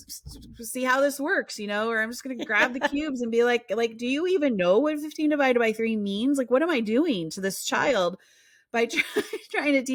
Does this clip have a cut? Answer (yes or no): no